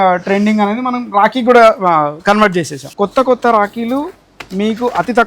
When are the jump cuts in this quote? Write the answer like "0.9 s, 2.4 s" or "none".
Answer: 2.8 s